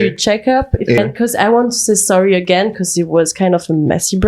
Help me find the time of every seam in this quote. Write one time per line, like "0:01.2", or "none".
0:01.0